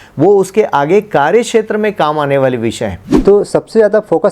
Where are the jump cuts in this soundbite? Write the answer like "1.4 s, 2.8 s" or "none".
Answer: 3.0 s